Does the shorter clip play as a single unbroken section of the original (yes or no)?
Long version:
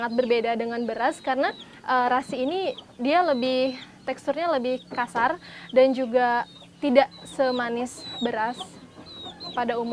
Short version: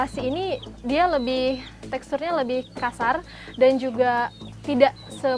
yes